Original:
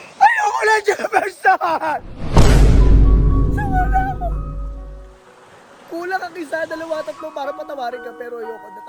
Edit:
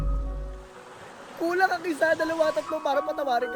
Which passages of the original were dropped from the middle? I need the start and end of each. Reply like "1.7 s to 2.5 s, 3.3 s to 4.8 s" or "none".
none